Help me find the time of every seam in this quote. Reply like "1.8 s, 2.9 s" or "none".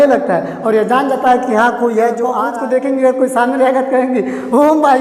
2.3 s